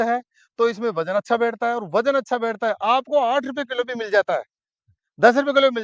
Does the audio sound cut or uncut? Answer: uncut